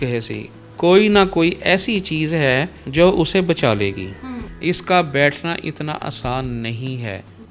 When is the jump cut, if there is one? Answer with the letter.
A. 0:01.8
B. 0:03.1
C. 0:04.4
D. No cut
C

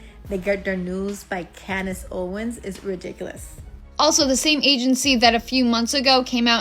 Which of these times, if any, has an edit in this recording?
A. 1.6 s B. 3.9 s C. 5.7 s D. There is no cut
B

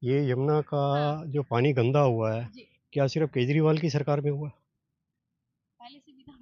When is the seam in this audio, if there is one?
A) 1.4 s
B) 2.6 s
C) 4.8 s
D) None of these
D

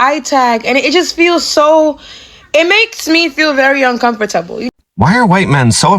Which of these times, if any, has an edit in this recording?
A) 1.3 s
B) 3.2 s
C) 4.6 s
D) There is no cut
C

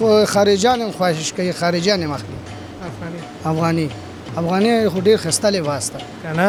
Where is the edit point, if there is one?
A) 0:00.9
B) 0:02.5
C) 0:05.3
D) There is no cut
D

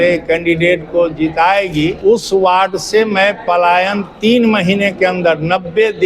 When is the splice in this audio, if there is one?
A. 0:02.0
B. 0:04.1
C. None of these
A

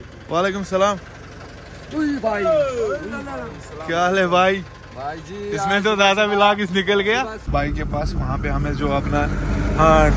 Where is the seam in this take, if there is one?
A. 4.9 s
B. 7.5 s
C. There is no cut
B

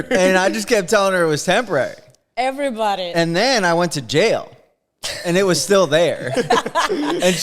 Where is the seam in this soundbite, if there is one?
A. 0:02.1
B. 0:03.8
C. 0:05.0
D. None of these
D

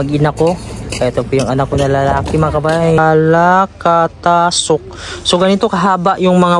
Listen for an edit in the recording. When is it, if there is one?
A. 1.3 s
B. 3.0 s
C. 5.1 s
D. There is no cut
B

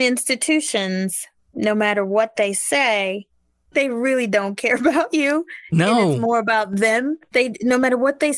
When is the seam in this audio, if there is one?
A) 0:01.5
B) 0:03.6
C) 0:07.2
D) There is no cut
B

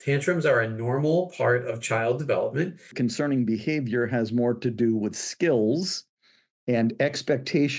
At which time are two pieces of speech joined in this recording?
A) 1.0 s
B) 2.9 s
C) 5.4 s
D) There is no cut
B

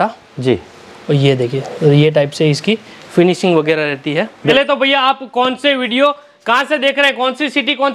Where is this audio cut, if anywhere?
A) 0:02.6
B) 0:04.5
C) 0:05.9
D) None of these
B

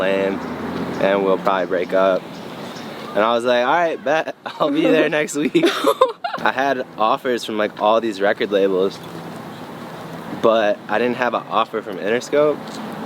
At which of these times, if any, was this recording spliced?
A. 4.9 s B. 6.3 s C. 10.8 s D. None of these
B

